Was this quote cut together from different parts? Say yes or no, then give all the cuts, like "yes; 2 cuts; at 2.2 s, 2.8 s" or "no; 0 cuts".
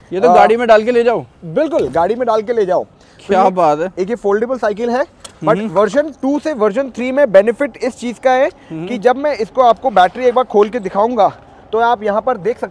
no; 0 cuts